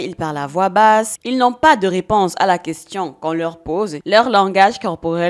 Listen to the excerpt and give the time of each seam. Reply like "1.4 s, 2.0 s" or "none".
4.0 s